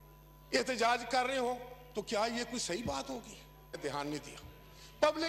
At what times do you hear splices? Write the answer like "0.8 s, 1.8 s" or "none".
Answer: 3.8 s